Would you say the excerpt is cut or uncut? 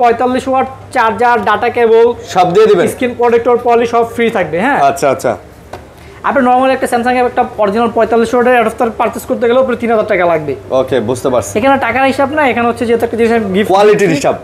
uncut